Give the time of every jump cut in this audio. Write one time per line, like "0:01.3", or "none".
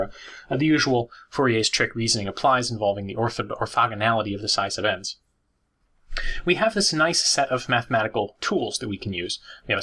0:01.4